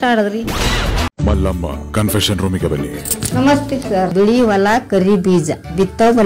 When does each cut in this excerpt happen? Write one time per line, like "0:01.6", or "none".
0:01.2
0:04.1